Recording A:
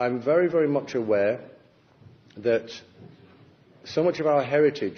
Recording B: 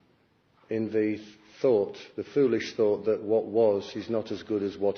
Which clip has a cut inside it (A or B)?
A